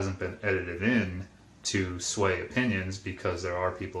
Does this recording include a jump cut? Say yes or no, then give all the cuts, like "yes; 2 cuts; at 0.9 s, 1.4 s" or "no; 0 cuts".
no; 0 cuts